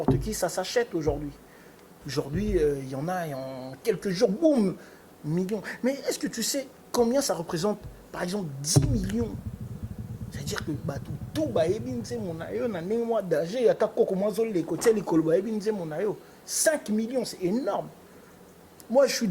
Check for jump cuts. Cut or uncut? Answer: uncut